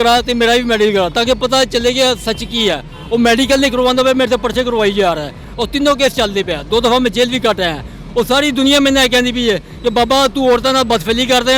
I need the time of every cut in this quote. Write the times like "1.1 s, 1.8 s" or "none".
5.4 s